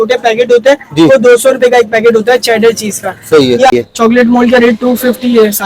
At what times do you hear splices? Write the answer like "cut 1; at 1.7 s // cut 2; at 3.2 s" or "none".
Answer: cut 1; at 3.7 s